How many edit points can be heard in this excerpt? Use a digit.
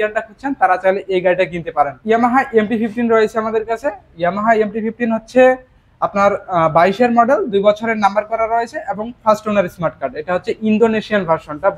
1